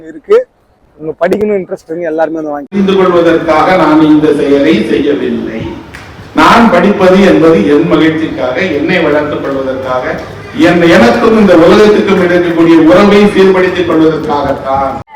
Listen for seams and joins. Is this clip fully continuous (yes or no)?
no